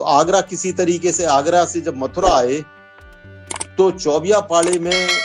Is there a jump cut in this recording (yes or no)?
no